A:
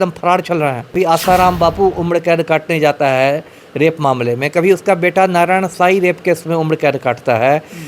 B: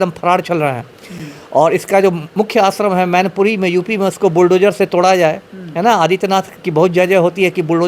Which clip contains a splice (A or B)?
A